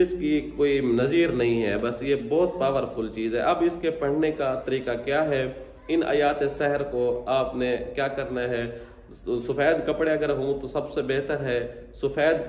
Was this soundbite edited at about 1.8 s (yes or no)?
no